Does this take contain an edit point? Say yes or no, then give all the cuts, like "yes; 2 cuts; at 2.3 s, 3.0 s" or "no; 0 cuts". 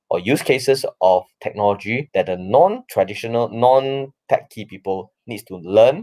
no; 0 cuts